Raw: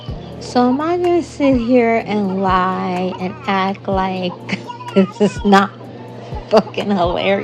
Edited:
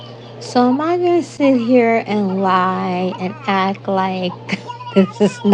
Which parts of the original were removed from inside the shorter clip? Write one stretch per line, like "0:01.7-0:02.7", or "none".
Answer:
none

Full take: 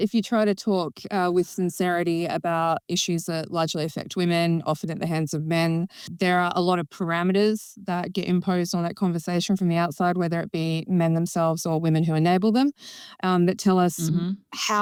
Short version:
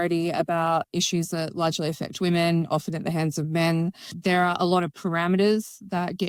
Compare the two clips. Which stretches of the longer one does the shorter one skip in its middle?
none

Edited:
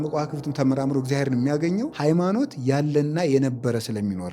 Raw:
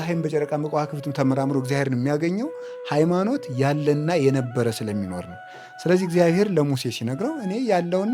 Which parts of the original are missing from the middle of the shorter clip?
0:02.5-0:02.8

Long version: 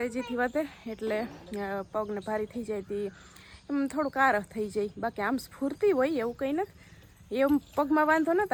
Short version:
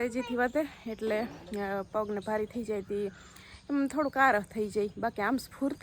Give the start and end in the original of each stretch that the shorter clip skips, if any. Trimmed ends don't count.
none

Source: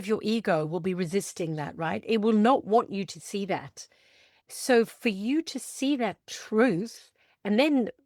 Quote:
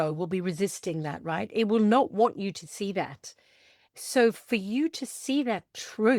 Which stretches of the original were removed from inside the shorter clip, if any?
none

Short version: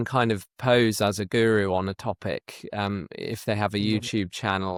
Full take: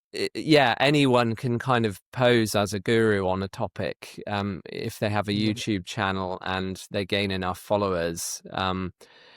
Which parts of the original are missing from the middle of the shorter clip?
none

